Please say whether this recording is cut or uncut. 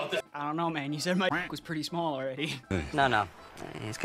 uncut